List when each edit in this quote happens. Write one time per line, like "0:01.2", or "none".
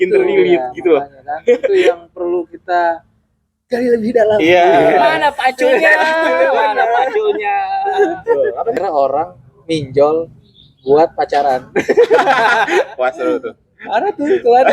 0:08.8